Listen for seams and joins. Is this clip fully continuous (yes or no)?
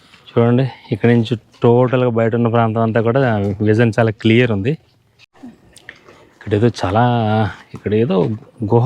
no